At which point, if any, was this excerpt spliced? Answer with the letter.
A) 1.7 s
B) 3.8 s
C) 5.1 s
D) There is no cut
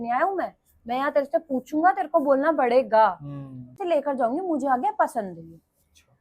B